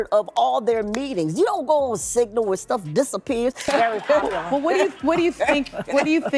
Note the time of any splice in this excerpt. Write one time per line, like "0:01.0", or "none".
0:03.6

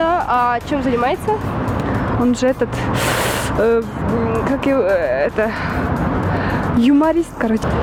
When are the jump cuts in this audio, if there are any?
none

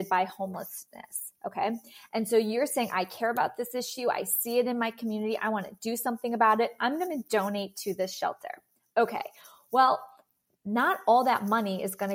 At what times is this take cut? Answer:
none

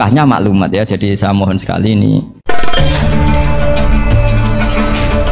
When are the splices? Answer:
0:02.4

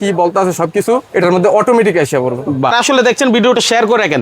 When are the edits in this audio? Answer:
0:02.7

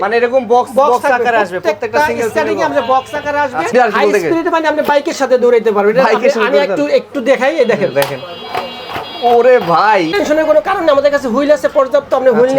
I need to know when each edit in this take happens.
0:03.7
0:10.1

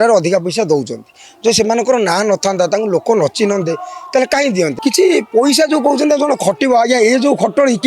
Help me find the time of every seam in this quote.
0:04.7

